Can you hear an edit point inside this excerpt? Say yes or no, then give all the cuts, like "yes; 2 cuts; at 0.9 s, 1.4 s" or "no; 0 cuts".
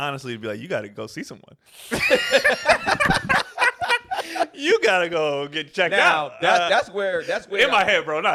no; 0 cuts